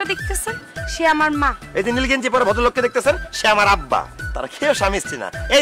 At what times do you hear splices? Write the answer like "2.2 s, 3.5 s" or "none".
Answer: none